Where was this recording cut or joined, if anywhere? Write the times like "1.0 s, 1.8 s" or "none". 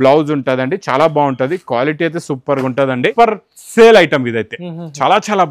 3.1 s